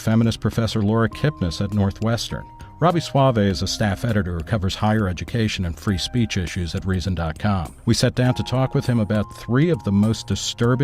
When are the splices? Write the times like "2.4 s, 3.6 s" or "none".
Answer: 1.5 s